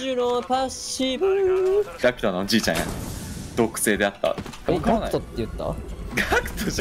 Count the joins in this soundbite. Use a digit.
2